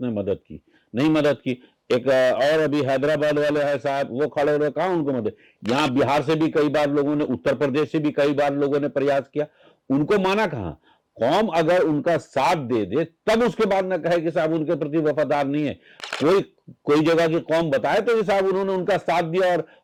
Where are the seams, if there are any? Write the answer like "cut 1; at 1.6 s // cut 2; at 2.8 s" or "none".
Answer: none